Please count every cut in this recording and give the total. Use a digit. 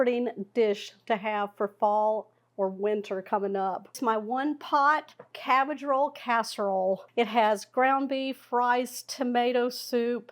2